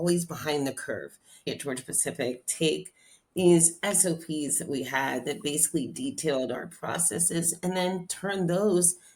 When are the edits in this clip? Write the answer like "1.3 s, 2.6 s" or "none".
1.5 s